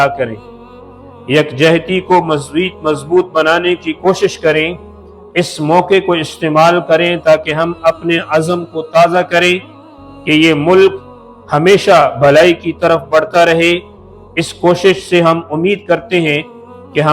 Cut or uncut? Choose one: uncut